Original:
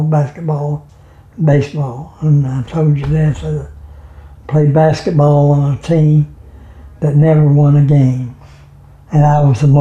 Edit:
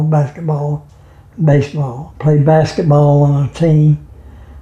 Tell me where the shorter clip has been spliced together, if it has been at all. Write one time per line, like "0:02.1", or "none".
0:02.0